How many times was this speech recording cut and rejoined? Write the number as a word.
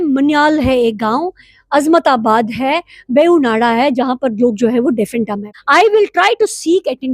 one